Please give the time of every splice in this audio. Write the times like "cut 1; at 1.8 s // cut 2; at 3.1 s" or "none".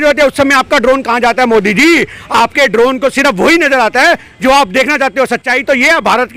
none